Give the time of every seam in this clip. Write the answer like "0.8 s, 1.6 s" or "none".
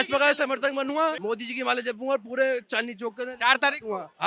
1.2 s